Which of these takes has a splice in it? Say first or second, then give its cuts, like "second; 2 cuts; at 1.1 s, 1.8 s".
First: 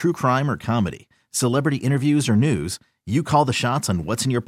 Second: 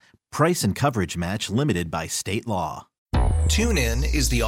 second; 1 cut; at 2.9 s